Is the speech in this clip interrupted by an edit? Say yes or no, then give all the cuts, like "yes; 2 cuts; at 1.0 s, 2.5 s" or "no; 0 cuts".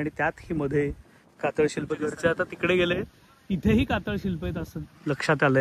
no; 0 cuts